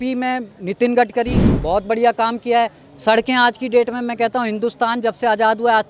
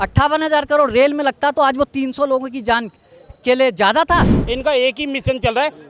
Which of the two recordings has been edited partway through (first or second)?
second